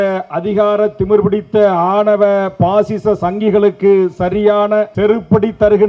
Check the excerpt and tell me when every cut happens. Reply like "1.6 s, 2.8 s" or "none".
4.9 s